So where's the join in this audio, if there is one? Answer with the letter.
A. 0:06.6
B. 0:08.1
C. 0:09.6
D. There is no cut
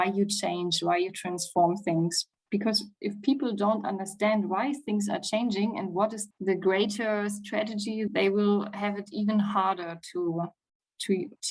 B